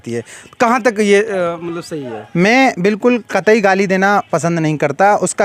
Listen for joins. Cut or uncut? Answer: uncut